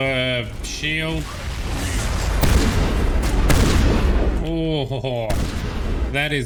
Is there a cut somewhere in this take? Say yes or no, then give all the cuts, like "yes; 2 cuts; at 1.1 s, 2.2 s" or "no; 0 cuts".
no; 0 cuts